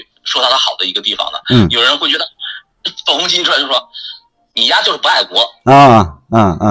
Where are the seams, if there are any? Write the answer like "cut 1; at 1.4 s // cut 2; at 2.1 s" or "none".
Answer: none